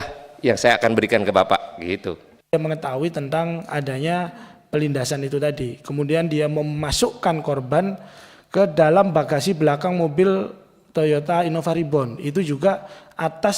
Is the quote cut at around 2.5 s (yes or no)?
yes